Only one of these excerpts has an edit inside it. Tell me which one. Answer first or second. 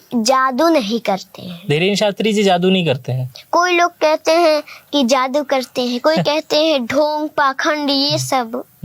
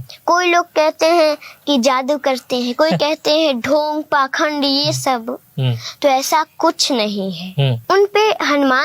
second